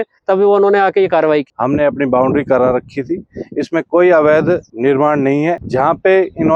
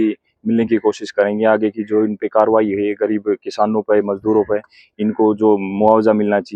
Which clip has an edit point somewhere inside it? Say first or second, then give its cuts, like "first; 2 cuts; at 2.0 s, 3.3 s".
first; 3 cuts; at 1.5 s, 4.7 s, 5.6 s